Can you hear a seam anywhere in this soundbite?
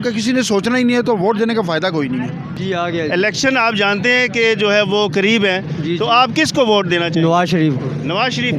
yes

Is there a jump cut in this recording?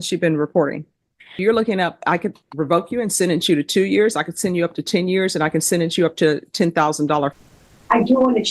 yes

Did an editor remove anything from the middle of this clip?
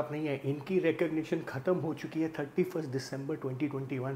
no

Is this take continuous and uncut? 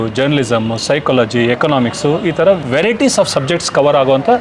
yes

